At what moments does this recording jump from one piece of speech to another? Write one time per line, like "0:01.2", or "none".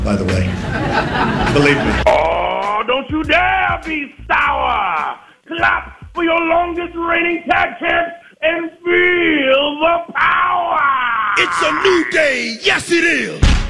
0:11.6